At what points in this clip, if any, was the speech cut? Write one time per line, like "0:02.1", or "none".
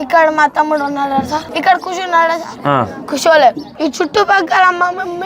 0:01.5
0:02.6
0:03.7